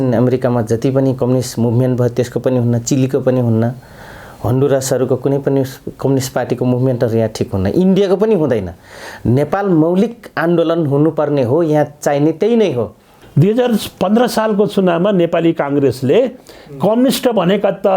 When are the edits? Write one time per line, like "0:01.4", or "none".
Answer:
0:13.2